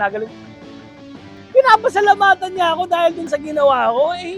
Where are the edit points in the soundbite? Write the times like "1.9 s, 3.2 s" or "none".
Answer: 3.3 s